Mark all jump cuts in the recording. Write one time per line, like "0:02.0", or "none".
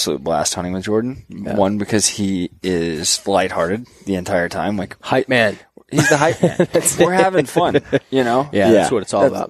none